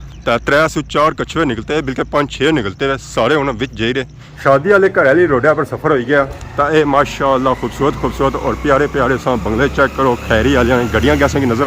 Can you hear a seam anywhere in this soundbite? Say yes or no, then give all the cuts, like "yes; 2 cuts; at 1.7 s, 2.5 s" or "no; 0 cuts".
yes; 1 cut; at 4.2 s